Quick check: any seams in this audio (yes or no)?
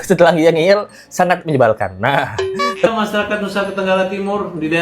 yes